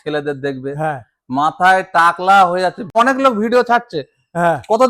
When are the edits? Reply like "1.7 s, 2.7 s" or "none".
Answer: 2.9 s